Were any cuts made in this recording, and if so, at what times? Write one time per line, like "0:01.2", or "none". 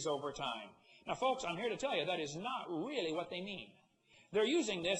none